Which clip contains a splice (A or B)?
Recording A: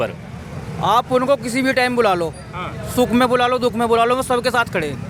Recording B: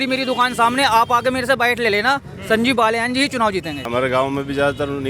B